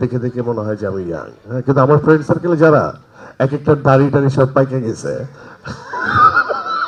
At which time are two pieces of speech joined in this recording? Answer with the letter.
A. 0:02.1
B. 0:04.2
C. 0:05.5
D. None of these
D